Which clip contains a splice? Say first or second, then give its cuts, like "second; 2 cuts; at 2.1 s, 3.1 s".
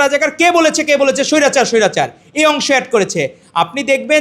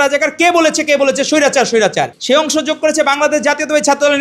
second; 1 cut; at 2.2 s